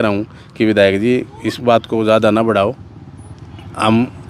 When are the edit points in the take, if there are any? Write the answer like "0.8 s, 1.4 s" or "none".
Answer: none